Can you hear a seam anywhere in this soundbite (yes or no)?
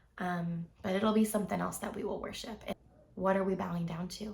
yes